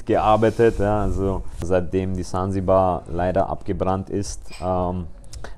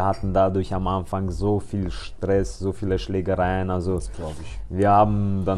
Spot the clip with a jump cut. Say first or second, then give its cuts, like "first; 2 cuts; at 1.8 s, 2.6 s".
first; 1 cut; at 1.6 s